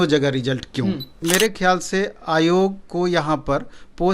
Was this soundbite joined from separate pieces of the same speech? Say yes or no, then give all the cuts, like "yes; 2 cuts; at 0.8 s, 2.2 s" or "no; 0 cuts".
yes; 1 cut; at 1.1 s